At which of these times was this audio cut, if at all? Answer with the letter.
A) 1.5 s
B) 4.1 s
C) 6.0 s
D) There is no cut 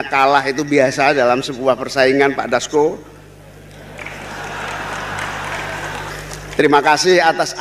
C